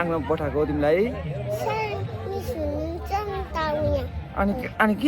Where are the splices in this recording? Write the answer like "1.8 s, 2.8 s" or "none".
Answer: none